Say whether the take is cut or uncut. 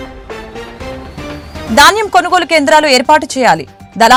uncut